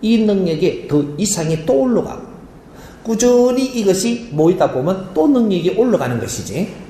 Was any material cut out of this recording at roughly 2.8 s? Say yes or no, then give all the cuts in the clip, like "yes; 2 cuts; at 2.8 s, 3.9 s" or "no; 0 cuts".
no; 0 cuts